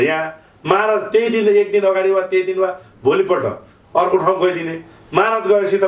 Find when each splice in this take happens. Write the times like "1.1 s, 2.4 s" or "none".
none